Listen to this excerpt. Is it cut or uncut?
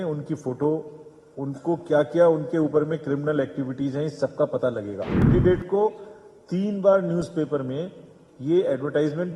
cut